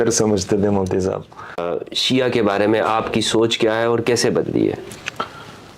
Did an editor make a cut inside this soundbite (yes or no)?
yes